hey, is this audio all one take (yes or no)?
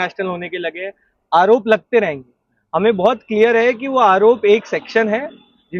yes